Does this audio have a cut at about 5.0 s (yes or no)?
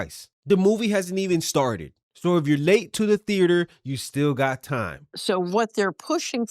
yes